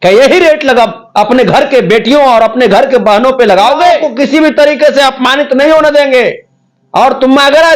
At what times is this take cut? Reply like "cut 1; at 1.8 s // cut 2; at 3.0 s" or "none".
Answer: cut 1; at 4.1 s